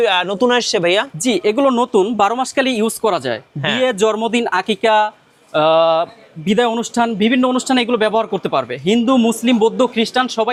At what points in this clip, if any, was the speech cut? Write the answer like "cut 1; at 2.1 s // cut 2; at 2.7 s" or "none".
none